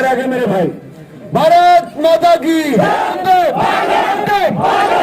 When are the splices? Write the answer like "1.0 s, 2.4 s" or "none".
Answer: 3.2 s